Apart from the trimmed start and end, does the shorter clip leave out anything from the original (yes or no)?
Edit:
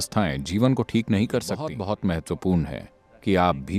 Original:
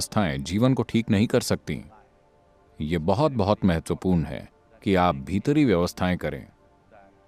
yes